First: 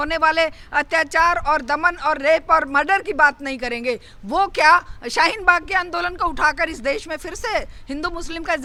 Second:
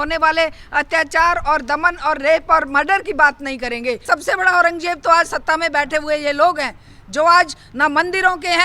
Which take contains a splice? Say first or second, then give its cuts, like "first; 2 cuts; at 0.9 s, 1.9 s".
second; 1 cut; at 4.0 s